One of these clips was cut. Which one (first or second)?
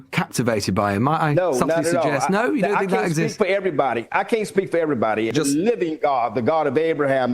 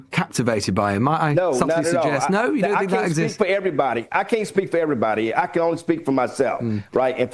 first